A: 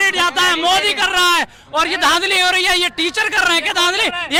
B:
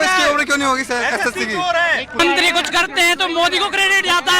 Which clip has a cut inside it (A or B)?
B